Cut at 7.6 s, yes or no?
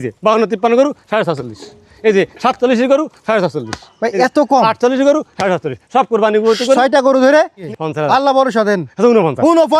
yes